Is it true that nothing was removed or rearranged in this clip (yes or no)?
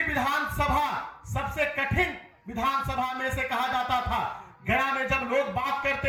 yes